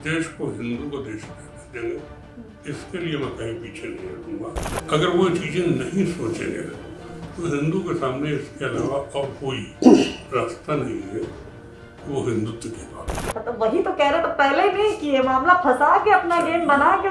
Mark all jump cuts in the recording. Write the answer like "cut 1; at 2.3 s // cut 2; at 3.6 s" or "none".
cut 1; at 4.7 s // cut 2; at 13.1 s